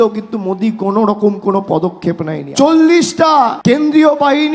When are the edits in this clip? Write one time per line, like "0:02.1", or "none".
0:02.4
0:03.6